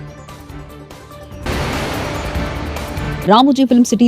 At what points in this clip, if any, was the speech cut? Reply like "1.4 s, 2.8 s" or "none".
0.9 s